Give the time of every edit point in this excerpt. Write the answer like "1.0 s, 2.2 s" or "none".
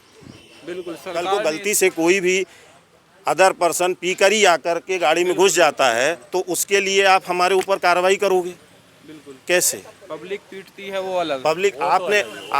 1.3 s